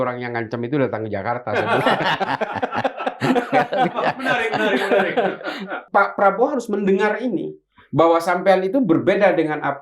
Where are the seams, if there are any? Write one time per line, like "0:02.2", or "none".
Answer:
0:05.8